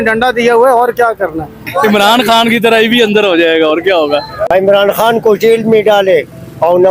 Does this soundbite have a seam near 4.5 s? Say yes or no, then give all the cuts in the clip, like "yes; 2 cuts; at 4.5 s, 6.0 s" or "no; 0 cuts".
yes; 2 cuts; at 1.7 s, 4.5 s